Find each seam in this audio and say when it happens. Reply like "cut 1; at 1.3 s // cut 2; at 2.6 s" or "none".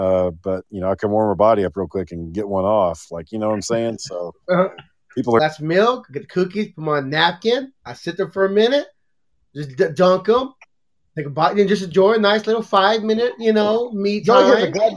cut 1; at 5.4 s